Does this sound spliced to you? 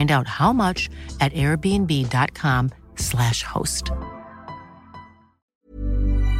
yes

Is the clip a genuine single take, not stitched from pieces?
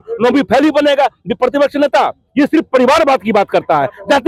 yes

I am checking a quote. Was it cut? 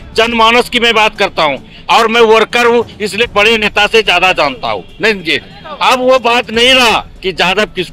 no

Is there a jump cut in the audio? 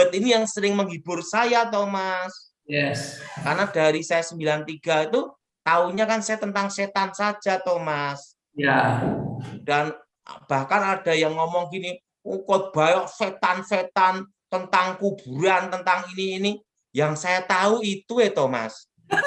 no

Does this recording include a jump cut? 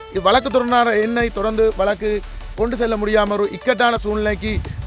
no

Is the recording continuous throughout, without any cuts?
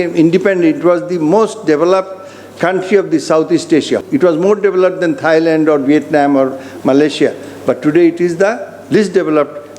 no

